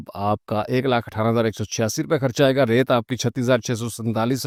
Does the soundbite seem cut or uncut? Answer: uncut